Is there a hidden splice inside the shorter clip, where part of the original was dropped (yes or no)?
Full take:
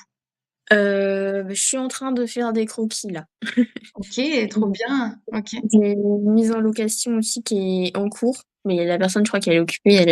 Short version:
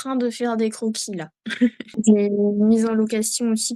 yes